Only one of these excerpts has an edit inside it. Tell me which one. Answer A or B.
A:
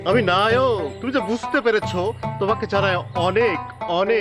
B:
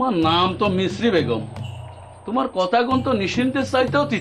A